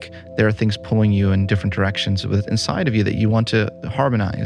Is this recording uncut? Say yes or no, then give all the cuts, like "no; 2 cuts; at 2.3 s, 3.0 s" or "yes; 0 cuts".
yes; 0 cuts